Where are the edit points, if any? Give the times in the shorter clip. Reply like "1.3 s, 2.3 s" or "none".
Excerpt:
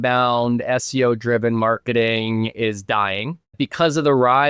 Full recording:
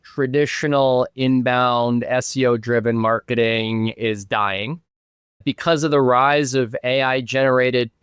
3.4 s